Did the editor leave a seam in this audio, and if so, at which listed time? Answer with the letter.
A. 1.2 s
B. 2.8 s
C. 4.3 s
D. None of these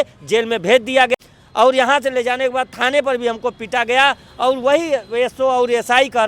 A